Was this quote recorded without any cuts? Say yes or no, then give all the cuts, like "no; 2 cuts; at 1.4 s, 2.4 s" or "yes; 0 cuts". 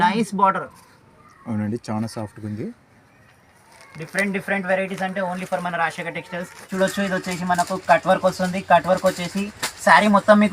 no; 1 cut; at 6.5 s